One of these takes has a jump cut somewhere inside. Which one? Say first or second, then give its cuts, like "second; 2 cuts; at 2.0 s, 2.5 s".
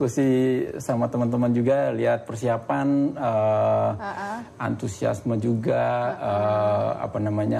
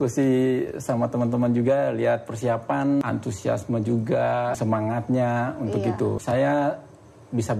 second; 3 cuts; at 3.0 s, 4.6 s, 6.2 s